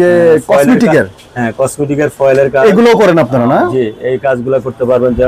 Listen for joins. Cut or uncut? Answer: uncut